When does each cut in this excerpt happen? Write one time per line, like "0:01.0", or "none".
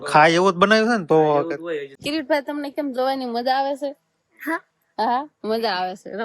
0:01.9